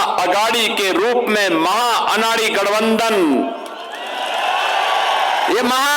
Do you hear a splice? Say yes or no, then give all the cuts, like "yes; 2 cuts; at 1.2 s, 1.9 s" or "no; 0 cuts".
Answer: no; 0 cuts